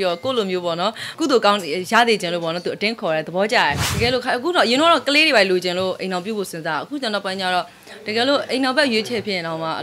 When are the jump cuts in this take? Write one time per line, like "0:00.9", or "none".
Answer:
0:01.1
0:03.9